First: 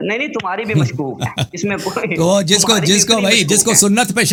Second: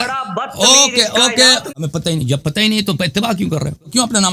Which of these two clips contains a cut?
second; 1 cut; at 1.6 s

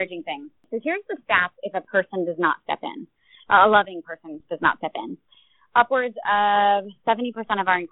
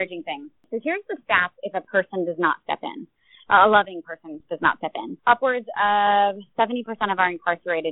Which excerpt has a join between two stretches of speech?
second; 1 cut; at 5.1 s

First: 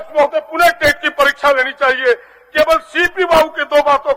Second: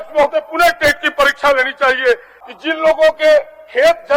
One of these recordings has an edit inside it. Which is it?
second; 1 cut; at 2.4 s

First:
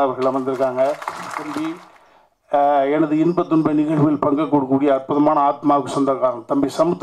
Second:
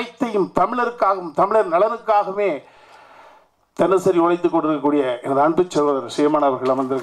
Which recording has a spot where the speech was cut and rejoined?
first; 1 cut; at 1.6 s

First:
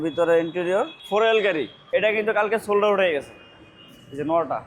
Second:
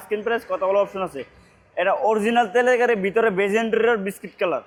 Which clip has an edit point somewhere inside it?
first; 2 cuts; at 1.0 s, 1.8 s

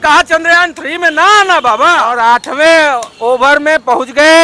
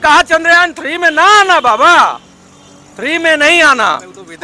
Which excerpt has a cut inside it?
first; 1 cut; at 2.0 s

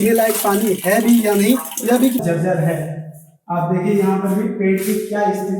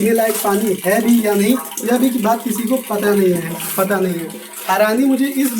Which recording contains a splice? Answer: first; 1 cut; at 2.2 s

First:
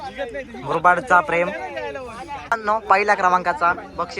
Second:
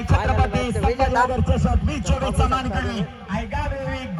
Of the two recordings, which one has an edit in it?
first; 1 cut; at 2.5 s

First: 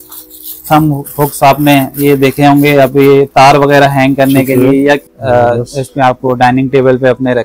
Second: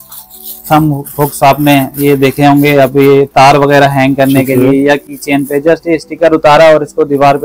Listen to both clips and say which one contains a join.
first; 1 cut; at 5.1 s

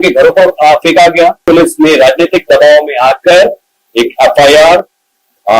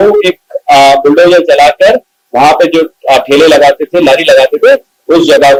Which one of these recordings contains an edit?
first; 1 cut; at 1.4 s

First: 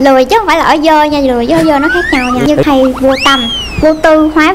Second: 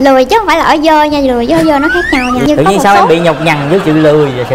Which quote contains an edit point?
first; 1 cut; at 2.6 s

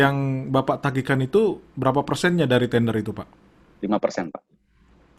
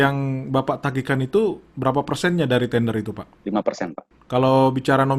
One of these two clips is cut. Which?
second; 2 cuts; at 3.3 s, 4.1 s

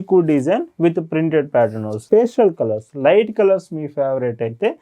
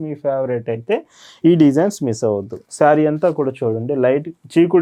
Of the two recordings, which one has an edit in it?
first; 1 cut; at 2.0 s

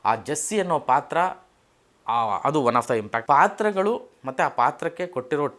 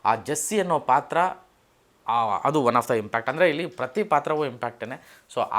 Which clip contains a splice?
first; 1 cut; at 3.1 s

